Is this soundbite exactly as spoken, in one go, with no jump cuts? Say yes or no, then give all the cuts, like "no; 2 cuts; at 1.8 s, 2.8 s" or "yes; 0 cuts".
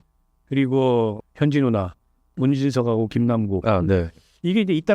no; 1 cut; at 1.2 s